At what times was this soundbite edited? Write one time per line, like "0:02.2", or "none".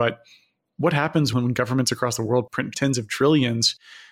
0:01.3
0:02.7